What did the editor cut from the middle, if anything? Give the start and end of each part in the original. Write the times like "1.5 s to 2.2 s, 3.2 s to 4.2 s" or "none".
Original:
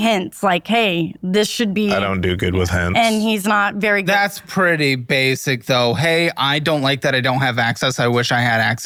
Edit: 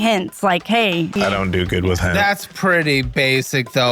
1.2 s to 1.9 s, 2.8 s to 4.1 s